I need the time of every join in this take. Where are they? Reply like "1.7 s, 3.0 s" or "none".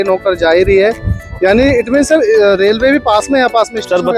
none